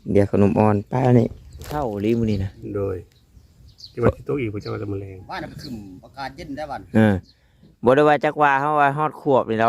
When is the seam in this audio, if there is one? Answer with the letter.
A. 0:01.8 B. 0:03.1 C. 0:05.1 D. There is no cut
A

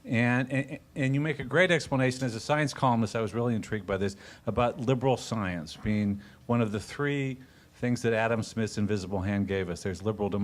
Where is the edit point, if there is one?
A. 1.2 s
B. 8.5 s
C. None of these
A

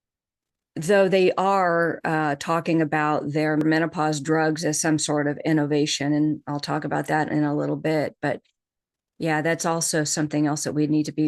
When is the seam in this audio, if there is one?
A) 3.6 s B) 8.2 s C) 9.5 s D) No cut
A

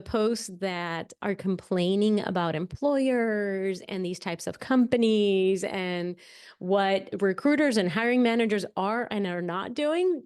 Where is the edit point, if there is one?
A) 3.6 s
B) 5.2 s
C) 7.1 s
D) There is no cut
C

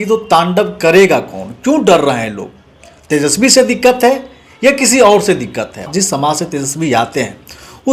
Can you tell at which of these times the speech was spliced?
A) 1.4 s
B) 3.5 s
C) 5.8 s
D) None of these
C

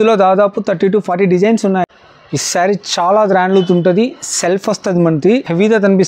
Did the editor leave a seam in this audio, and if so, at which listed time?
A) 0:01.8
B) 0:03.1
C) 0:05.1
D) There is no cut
A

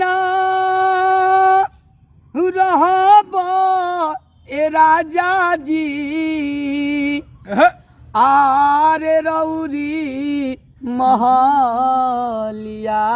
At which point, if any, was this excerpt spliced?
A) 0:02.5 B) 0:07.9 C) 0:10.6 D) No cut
D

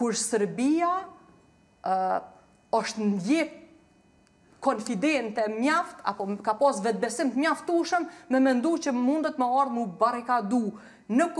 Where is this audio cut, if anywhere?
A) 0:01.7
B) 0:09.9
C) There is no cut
C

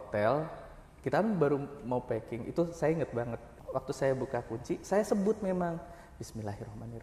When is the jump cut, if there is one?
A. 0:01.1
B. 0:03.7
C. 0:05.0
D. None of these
B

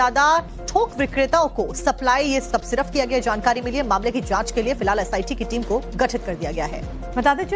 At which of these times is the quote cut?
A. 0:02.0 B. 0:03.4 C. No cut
A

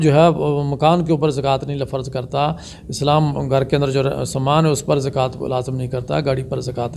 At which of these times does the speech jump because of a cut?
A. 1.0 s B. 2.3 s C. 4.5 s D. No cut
D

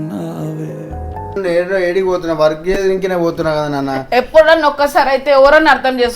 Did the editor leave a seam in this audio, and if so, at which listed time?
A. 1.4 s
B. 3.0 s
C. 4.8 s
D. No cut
A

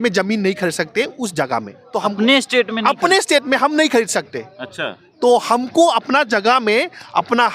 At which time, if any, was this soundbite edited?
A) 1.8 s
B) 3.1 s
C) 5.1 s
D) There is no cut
A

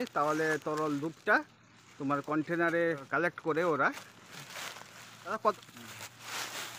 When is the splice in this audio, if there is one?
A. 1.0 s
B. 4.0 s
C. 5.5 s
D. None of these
C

